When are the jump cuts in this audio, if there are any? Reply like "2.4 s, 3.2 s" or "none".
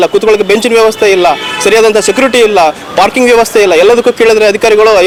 none